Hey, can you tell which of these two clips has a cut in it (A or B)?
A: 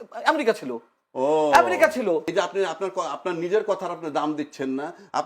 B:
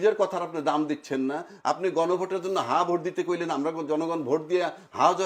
A